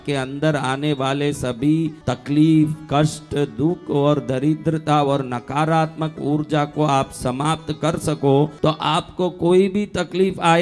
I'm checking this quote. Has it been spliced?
yes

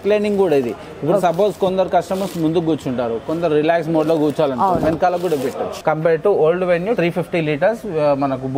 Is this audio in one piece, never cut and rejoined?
no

